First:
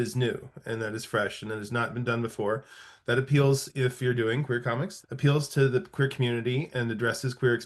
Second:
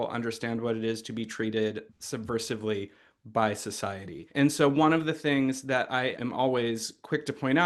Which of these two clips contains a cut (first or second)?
first